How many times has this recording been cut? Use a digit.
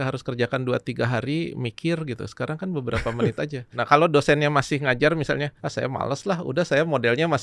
2